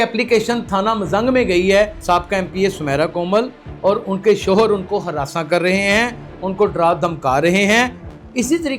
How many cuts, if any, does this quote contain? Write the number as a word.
one